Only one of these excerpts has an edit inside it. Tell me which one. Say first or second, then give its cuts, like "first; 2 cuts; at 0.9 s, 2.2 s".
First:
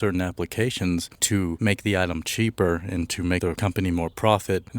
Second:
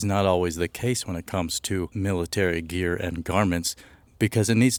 first; 2 cuts; at 1.6 s, 3.5 s